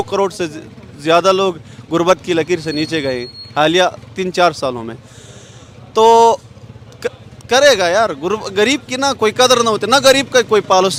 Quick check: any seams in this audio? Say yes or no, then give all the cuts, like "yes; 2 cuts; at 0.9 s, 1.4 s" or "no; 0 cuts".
no; 0 cuts